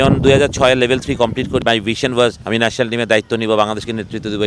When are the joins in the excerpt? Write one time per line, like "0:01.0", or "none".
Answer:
0:01.6
0:02.4